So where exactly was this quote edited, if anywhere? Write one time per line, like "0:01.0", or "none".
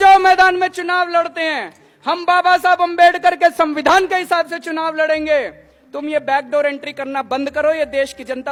none